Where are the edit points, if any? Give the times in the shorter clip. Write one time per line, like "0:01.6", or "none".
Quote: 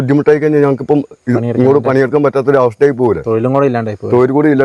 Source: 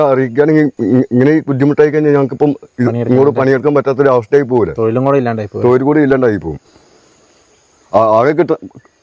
none